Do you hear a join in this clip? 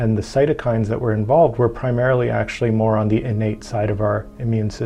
no; 0 cuts

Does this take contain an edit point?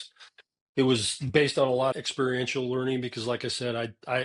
yes; 1 cut; at 1.9 s

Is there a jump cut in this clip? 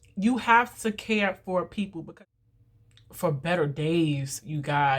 yes; 1 cut; at 2.1 s

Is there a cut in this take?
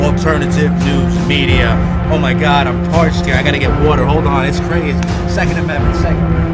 yes; 1 cut; at 3.9 s

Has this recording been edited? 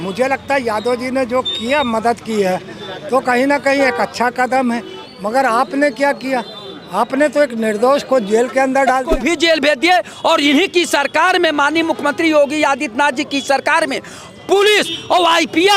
yes; 1 cut; at 9.1 s

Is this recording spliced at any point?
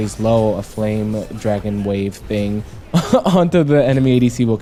no; 0 cuts

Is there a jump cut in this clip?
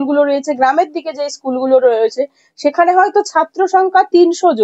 no; 0 cuts

